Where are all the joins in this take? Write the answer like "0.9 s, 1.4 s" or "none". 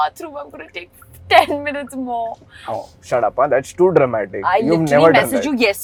none

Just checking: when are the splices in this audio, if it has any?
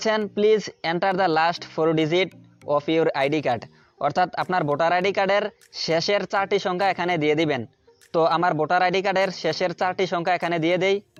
none

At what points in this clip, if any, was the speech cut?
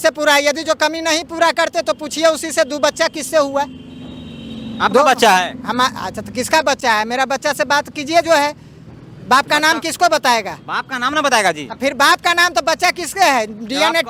none

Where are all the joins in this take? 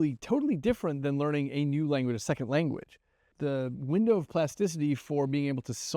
3.3 s

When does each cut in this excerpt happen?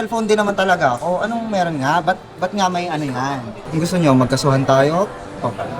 3.6 s

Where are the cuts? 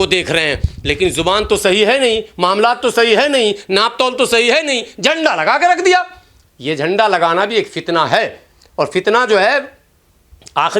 none

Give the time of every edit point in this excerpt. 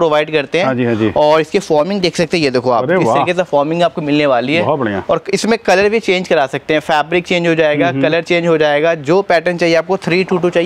none

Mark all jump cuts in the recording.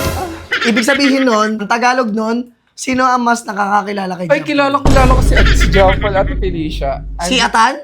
1.6 s

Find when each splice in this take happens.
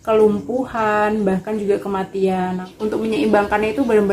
2.7 s

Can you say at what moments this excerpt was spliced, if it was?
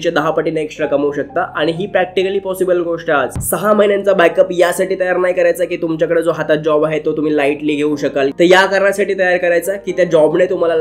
3.4 s, 8.3 s

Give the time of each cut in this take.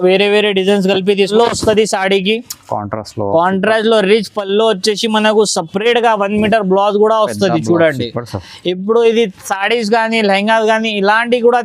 1.3 s

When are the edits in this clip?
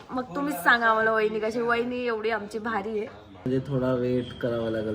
3.5 s

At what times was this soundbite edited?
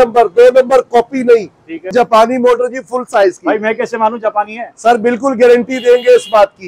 1.9 s

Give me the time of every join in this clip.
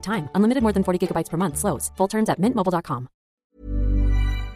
3.3 s

